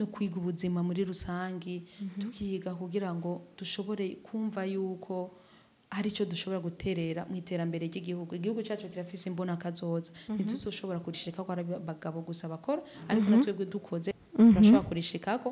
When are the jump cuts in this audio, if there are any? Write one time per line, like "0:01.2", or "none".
0:14.2